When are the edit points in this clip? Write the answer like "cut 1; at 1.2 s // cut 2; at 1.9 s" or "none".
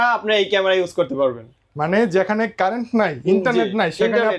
none

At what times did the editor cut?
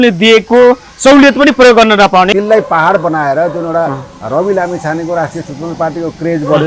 cut 1; at 2.3 s

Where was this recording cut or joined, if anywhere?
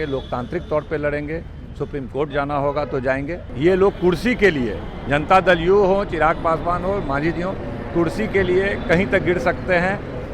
cut 1; at 3.4 s

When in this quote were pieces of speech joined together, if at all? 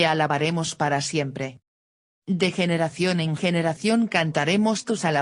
none

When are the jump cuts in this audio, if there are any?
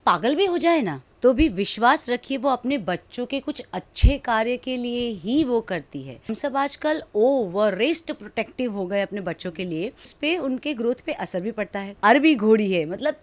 cut 1; at 1.0 s // cut 2; at 6.3 s // cut 3; at 10.1 s // cut 4; at 11.8 s

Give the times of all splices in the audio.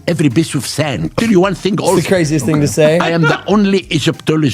cut 1; at 1.2 s

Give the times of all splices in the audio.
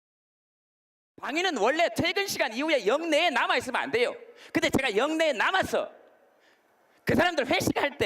cut 1; at 2.3 s

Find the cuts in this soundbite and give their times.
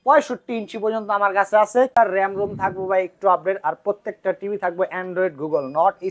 cut 1; at 1.9 s

